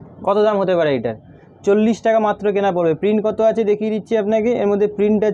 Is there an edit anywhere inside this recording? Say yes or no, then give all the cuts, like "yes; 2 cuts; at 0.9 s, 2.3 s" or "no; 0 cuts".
no; 0 cuts